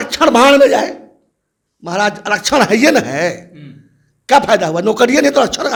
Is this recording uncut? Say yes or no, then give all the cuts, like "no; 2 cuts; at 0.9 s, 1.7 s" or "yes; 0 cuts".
yes; 0 cuts